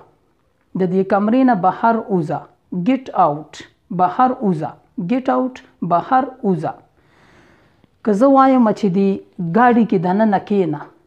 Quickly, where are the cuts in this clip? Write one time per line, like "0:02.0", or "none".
none